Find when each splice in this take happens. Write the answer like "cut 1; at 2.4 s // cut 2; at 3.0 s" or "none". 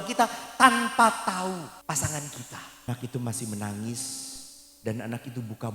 cut 1; at 1.8 s // cut 2; at 2.9 s

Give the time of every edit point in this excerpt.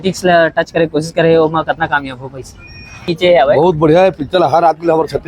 cut 1; at 3.1 s

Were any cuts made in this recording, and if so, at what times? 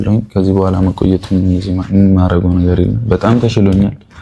none

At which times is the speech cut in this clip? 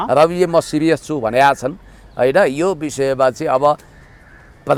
none

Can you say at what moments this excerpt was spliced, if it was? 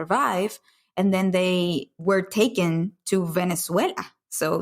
cut 1; at 1.9 s

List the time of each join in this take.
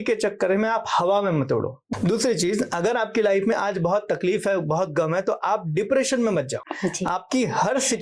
cut 1; at 1.8 s // cut 2; at 6.6 s

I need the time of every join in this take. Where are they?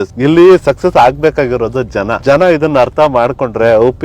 cut 1; at 2.2 s

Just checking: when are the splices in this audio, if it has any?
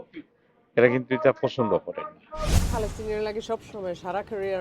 cut 1; at 2.7 s

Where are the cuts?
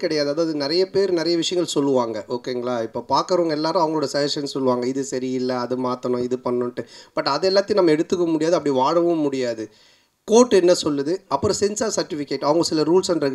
none

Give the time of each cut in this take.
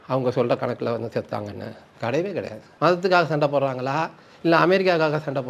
cut 1; at 2.6 s

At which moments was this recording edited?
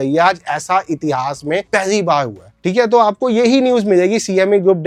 none

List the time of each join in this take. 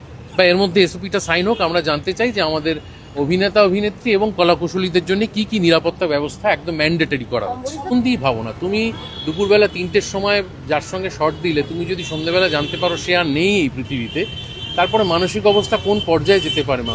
cut 1; at 7.9 s

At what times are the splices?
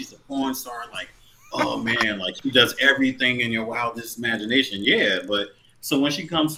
none

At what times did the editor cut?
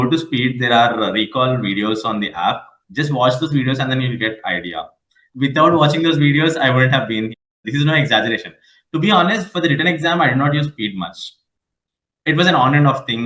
cut 1; at 5.2 s

